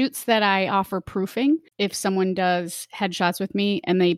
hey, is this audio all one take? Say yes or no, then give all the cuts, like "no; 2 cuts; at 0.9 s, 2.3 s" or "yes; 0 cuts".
no; 1 cut; at 1.7 s